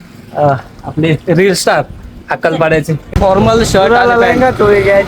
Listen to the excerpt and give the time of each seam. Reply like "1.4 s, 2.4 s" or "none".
3.1 s

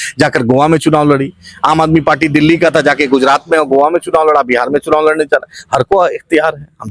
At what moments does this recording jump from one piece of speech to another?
none

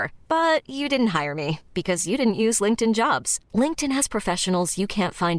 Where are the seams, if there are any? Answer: none

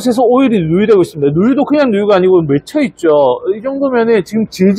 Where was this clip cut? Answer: none

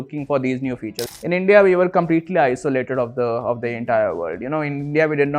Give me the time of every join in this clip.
1.0 s

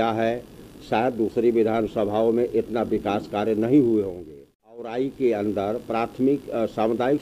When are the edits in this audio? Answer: 4.9 s

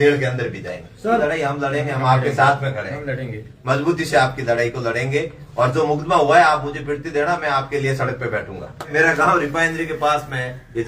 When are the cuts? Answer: 1.2 s, 8.9 s

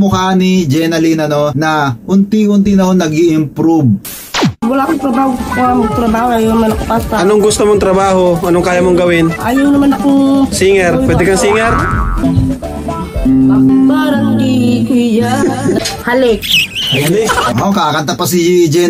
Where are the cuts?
1.5 s, 4.4 s, 13.7 s, 15.8 s

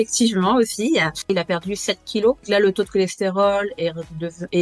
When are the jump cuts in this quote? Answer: 1.3 s, 2.4 s

